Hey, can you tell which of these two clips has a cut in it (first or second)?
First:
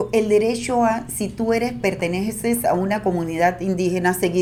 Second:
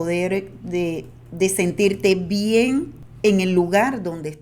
second